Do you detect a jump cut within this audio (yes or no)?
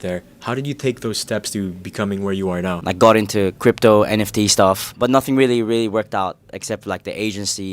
yes